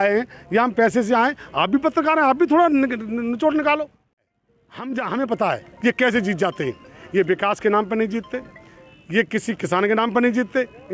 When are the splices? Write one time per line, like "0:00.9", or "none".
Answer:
0:04.3